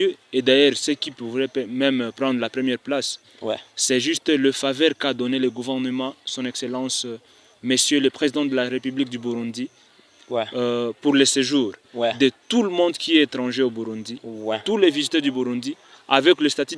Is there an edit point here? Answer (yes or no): no